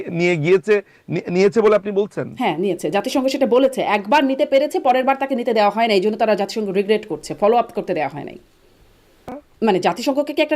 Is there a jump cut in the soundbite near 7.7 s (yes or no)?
no